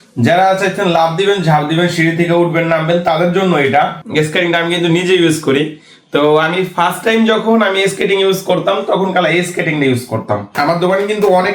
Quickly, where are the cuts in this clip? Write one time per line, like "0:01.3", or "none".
0:04.0
0:10.5